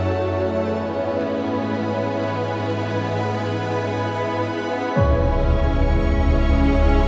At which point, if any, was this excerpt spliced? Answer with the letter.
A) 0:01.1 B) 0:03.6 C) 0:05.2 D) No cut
D